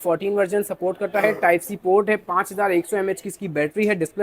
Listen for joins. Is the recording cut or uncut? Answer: uncut